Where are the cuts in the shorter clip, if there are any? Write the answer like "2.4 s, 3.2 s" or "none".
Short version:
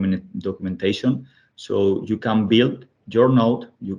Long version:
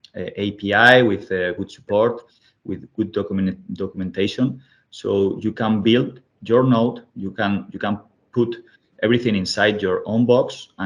none